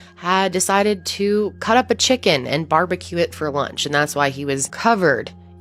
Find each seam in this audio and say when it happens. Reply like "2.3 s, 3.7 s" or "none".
none